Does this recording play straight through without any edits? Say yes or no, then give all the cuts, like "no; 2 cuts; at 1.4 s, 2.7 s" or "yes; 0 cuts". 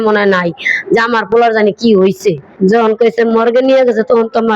no; 1 cut; at 2.5 s